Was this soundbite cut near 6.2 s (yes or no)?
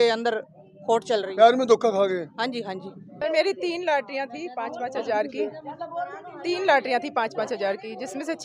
no